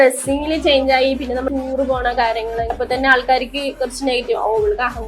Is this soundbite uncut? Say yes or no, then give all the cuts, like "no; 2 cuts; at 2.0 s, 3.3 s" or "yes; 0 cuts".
no; 2 cuts; at 1.5 s, 2.8 s